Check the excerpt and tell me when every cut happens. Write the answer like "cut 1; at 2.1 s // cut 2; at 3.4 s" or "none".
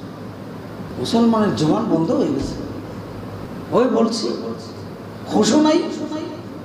cut 1; at 0.9 s // cut 2; at 3.5 s

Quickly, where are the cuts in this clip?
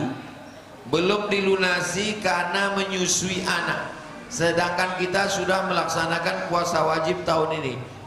none

